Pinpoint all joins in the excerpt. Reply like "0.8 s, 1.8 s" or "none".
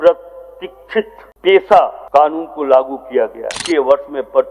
1.2 s, 2.0 s, 3.6 s